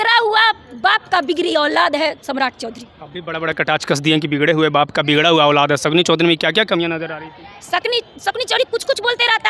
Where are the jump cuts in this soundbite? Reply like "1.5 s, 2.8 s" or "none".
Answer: none